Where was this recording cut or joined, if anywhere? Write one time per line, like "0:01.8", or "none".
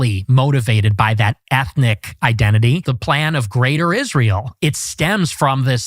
0:02.9
0:04.5